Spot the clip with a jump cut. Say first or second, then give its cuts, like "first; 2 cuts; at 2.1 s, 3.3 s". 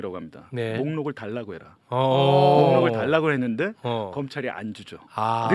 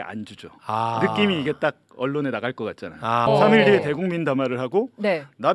second; 1 cut; at 3.3 s